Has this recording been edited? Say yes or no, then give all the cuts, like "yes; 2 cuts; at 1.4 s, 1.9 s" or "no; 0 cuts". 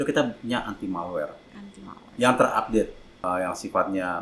yes; 1 cut; at 3.1 s